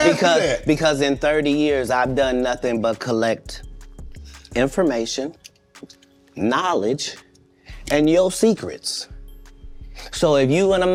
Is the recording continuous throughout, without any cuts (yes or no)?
yes